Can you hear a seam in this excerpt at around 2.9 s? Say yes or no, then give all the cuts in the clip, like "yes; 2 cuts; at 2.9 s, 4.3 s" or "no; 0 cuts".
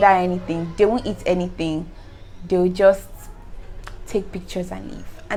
no; 0 cuts